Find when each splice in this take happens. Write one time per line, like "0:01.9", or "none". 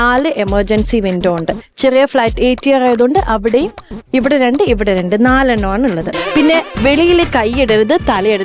0:06.2